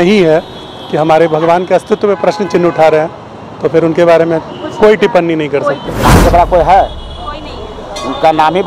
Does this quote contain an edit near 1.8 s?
no; 1 cut; at 6.0 s

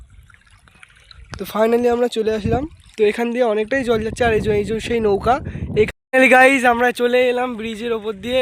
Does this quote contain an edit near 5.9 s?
yes; 1 cut; at 5.9 s

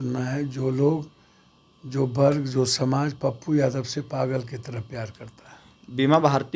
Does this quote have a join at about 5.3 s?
no; 0 cuts

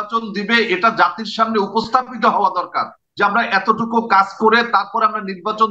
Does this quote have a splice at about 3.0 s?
no; 0 cuts

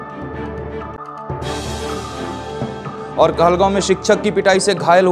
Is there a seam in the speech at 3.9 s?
no; 2 cuts; at 1.0 s, 2.5 s

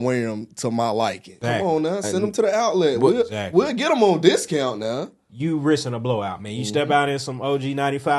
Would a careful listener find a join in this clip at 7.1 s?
no; 2 cuts; at 1.3 s, 5.2 s

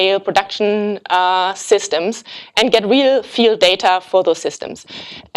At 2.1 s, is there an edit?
no; 1 cut; at 3.7 s

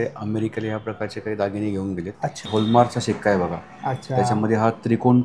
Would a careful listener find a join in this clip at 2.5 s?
yes; 1 cut; at 2.5 s

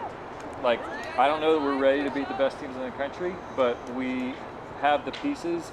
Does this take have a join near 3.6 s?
no; 1 cut; at 1.0 s

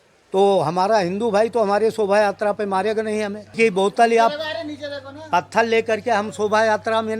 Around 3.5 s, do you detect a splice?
yes; 1 cut; at 3.5 s

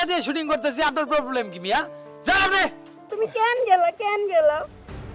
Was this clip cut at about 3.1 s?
yes; 1 cut; at 3.1 s

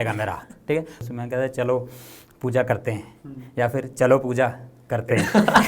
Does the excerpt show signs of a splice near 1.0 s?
yes; 1 cut; at 1.0 s

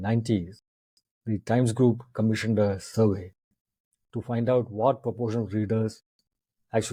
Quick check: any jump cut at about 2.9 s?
no; 0 cuts

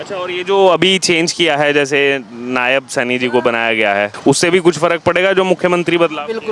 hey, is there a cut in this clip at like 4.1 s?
yes; 1 cut; at 4.1 s

